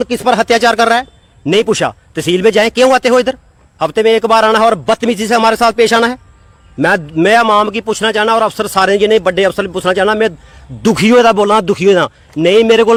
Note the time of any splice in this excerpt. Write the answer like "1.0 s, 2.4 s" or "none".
none